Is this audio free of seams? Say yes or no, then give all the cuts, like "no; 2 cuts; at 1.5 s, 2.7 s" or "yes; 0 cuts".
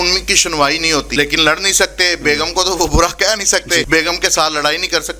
no; 2 cuts; at 1.1 s, 3.9 s